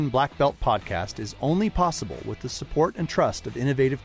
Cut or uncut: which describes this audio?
uncut